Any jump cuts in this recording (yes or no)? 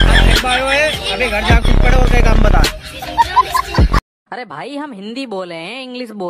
yes